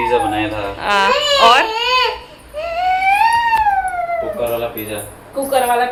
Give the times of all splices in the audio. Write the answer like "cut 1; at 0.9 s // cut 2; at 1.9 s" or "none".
none